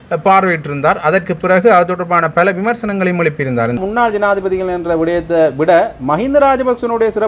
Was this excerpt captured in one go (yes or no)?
no